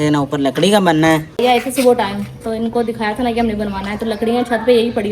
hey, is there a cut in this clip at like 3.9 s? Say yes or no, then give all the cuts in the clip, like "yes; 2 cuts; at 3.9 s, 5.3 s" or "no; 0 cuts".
no; 1 cut; at 1.4 s